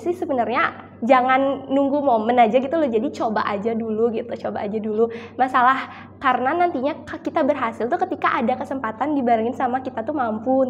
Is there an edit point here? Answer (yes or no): no